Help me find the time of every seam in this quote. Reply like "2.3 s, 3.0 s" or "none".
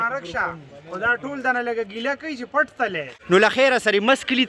3.1 s